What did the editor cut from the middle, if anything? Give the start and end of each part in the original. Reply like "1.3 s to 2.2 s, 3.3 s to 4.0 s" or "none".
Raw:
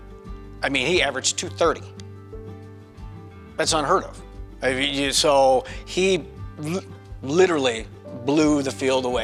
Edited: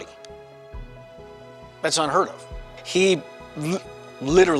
4.5 s to 5.8 s